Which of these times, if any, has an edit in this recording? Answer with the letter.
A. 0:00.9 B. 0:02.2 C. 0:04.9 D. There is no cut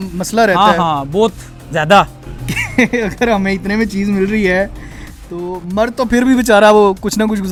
D